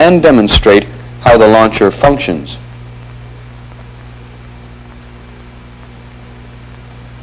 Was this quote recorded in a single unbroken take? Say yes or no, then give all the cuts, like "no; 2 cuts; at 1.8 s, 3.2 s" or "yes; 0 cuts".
yes; 0 cuts